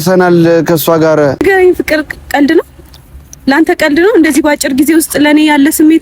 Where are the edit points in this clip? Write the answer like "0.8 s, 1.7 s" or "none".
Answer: 1.4 s